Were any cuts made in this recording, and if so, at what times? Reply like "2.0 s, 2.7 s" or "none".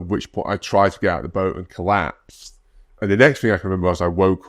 2.9 s